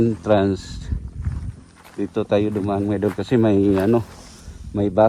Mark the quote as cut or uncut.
uncut